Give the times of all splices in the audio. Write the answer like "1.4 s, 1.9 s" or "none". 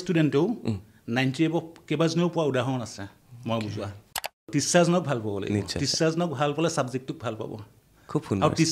4.4 s